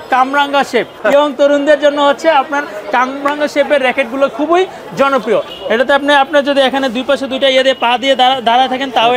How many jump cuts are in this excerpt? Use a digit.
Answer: 2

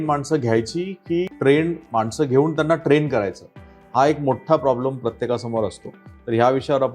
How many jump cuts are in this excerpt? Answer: 1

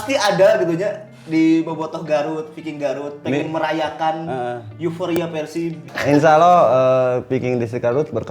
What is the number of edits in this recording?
1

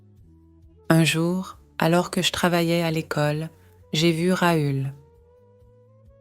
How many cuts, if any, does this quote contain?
2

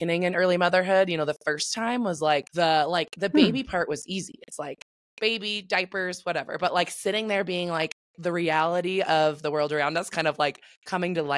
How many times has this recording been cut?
1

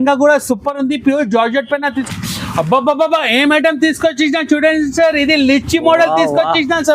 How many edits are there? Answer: 1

